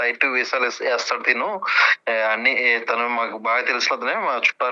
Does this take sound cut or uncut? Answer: uncut